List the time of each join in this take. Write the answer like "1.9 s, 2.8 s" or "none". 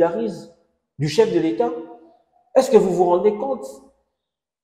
none